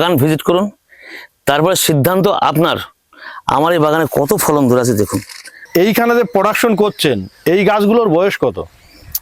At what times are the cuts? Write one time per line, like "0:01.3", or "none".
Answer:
0:05.7